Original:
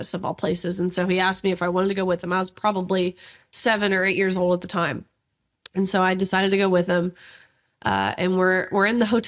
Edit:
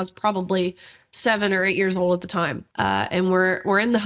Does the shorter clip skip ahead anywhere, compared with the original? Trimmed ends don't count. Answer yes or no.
yes